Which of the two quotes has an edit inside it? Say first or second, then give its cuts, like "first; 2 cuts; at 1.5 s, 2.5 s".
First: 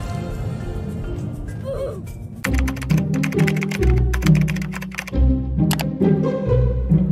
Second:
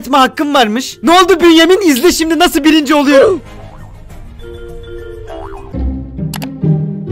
second; 2 cuts; at 1.0 s, 5.6 s